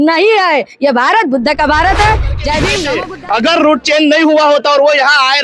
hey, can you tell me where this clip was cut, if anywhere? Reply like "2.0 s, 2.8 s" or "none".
2.8 s